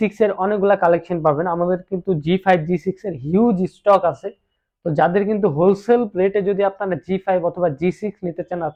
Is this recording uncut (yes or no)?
yes